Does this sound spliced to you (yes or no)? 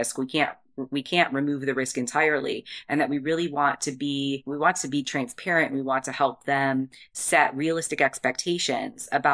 yes